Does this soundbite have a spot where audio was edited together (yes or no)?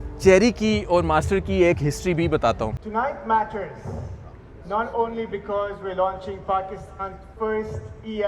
yes